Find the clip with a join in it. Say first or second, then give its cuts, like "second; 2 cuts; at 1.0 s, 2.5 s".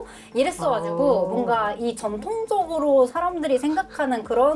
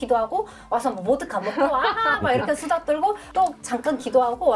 second; 1 cut; at 3.3 s